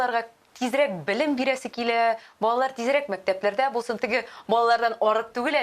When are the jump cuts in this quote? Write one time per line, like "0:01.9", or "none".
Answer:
none